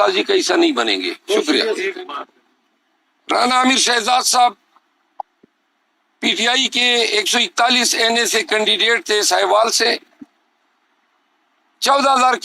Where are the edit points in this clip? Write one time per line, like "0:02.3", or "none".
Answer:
0:02.1